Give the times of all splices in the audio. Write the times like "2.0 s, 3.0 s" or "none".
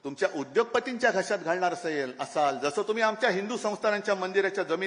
none